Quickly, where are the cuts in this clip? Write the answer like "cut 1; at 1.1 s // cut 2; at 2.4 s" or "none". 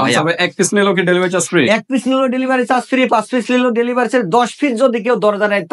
none